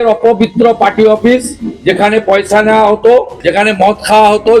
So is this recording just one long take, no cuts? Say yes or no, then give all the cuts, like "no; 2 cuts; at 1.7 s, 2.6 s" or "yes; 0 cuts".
no; 1 cut; at 3.4 s